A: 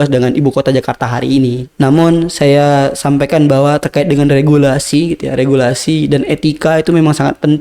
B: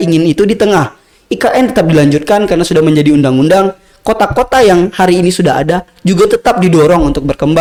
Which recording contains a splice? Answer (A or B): A